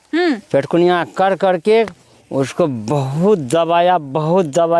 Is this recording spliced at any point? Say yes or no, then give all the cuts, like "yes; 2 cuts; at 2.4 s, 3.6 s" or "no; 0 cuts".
no; 0 cuts